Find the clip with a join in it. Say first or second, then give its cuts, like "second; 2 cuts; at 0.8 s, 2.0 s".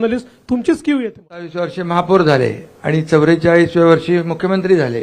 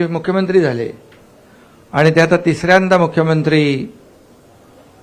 first; 1 cut; at 1.7 s